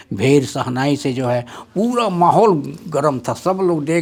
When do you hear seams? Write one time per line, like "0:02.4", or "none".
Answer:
none